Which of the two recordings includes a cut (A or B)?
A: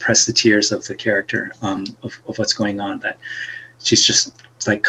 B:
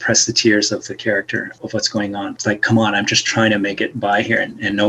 B